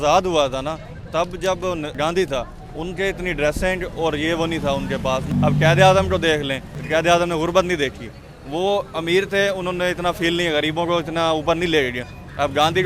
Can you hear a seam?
yes; 3 cuts; at 2.0 s, 5.3 s, 6.7 s

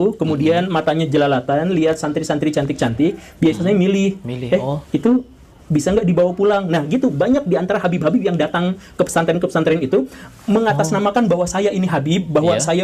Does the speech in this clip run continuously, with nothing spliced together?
yes; 0 cuts

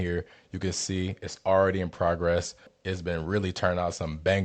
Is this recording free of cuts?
no; 1 cut; at 2.6 s

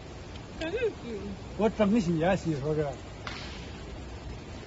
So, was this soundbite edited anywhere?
no; 0 cuts

